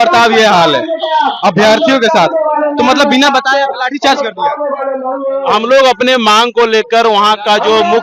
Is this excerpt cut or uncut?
uncut